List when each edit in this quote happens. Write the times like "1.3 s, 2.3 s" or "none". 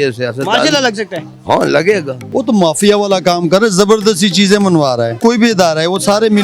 2.2 s, 5.2 s